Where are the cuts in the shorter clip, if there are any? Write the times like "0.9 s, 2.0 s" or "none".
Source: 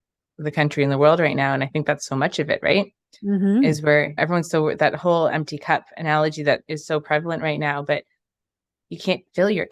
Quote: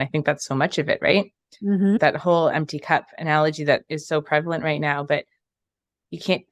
2.0 s

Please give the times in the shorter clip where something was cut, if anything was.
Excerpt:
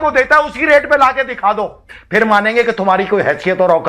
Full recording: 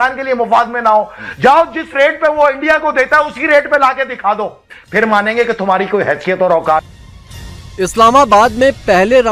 none

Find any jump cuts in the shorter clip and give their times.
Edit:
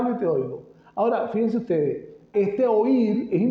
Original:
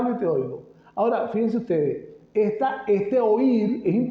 2.3 s

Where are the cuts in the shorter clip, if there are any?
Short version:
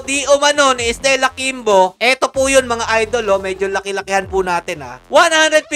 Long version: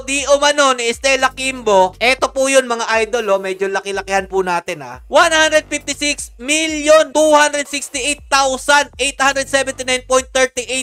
none

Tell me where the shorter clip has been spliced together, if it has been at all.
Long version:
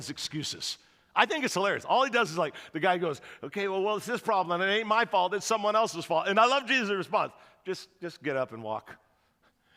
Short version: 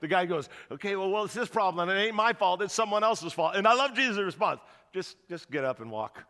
none

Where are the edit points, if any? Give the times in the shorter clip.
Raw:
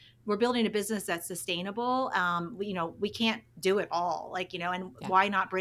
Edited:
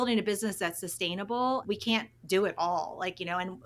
1.6 s

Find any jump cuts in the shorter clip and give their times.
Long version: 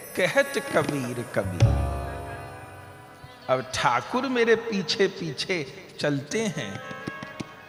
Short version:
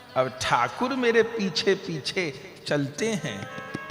none

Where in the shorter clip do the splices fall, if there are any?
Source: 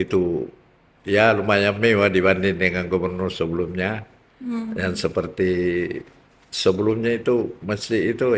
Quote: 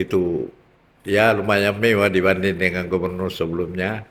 none

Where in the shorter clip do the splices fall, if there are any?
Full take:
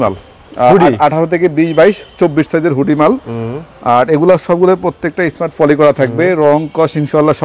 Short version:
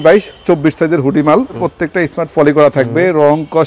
1.6 s

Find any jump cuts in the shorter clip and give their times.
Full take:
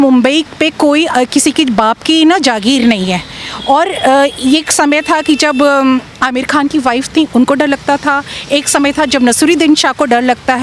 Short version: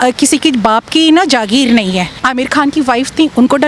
2.2 s

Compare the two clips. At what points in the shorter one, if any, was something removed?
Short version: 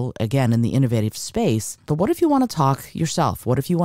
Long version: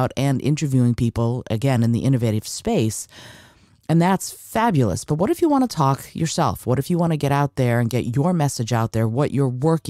1.8 s

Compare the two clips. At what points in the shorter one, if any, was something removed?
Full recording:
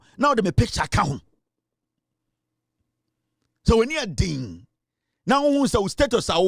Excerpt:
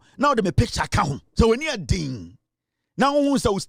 1.2 s

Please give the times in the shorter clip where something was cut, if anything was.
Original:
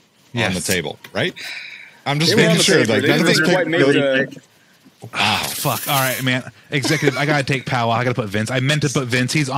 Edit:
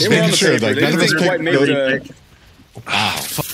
none

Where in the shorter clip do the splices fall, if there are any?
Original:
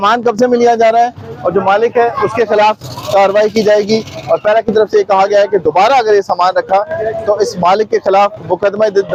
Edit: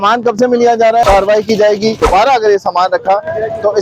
1.0 s, 2.0 s

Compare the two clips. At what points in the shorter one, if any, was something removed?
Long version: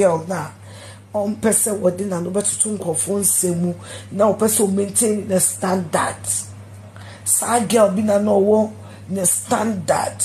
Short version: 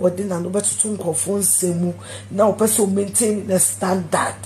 none

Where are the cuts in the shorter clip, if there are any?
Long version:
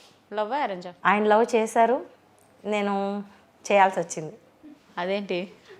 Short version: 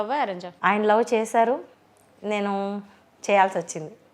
none

